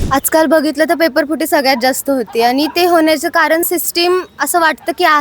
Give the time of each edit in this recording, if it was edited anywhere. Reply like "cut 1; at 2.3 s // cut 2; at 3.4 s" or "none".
none